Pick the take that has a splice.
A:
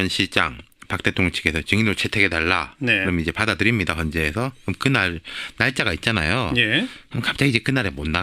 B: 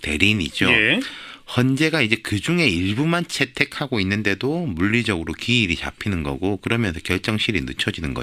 A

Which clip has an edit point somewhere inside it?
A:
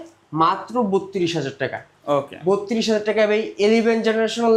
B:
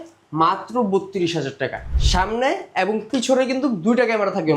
B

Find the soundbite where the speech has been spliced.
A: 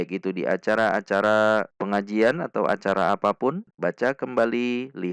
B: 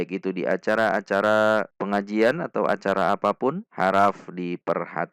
A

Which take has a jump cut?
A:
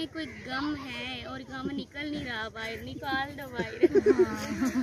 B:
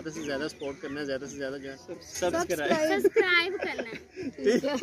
B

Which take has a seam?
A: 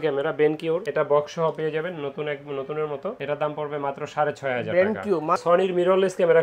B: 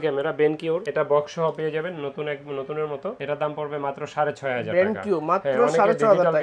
A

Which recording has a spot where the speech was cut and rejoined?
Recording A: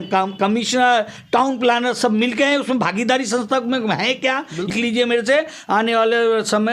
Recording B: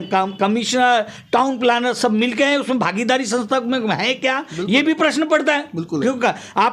A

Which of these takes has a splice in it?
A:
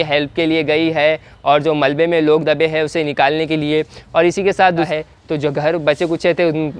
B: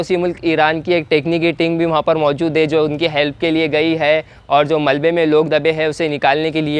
A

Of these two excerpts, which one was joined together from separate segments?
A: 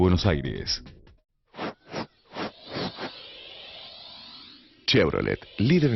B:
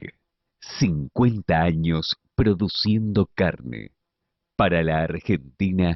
A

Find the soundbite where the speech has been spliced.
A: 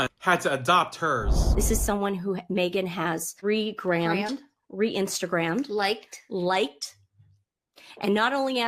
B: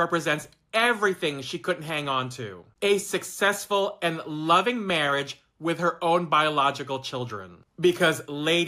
A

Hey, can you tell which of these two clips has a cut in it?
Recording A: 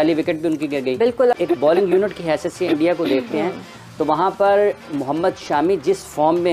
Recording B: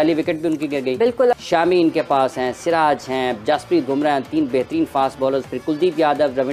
B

